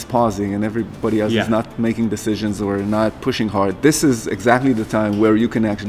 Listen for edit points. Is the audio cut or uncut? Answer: uncut